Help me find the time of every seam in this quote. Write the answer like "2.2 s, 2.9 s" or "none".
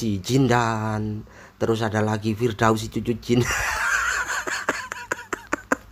none